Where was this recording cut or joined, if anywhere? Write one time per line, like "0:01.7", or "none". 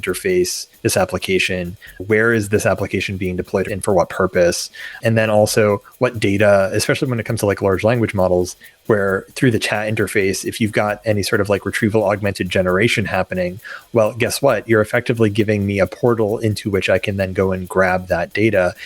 0:01.9
0:03.7
0:05.0

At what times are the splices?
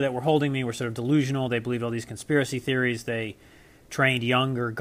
none

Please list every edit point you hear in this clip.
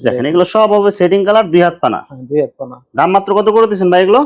none

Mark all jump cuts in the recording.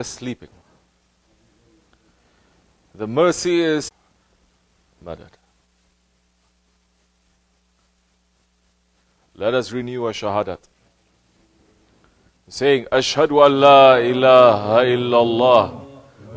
none

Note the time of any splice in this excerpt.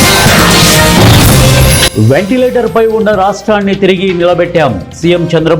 0:01.9

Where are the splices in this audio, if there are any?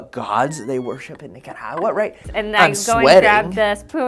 0:02.2

